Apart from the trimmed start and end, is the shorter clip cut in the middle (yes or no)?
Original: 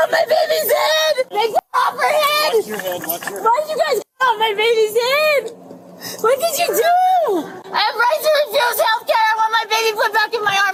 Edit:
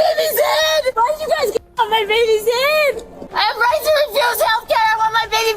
yes